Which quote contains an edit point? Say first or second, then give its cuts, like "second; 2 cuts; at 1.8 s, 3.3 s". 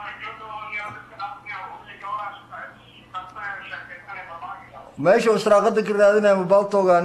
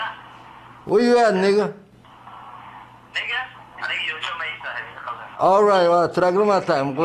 second; 1 cut; at 3.0 s